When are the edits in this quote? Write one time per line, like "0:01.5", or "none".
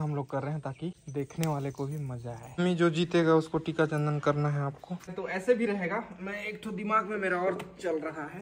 0:01.0
0:02.5
0:05.1